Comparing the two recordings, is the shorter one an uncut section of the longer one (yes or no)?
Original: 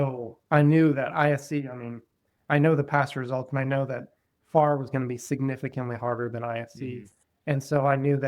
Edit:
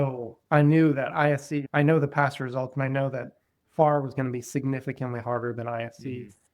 no